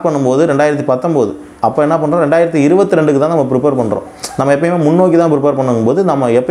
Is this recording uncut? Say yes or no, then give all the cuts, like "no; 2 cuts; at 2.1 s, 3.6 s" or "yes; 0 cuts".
yes; 0 cuts